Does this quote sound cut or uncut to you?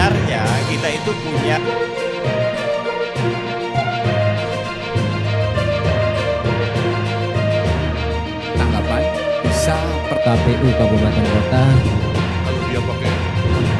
uncut